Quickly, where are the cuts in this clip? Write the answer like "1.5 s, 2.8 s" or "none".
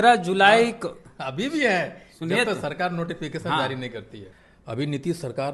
4.2 s

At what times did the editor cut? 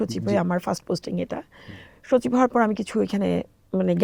none

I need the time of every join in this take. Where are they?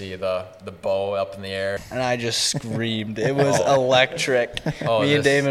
1.8 s

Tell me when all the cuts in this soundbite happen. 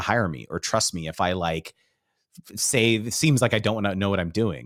none

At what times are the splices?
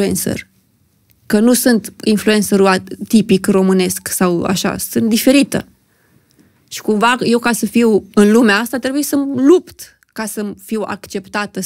none

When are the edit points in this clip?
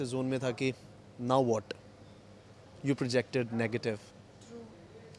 none

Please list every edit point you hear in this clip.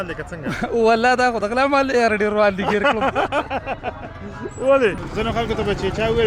4.9 s

